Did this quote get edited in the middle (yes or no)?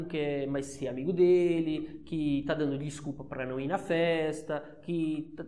no